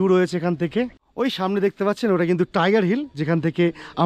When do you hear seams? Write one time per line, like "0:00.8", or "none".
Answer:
0:01.0